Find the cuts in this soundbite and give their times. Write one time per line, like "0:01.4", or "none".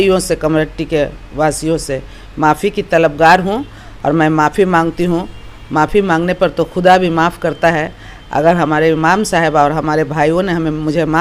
none